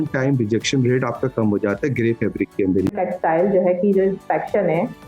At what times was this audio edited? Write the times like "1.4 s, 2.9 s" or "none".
3.0 s